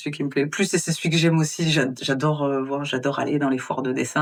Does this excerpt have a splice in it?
no; 0 cuts

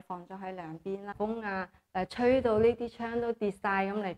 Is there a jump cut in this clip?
yes; 1 cut; at 1.1 s

